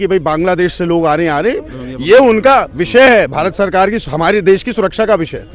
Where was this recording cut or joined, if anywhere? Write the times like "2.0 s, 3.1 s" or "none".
none